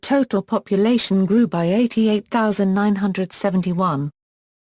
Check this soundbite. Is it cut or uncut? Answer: cut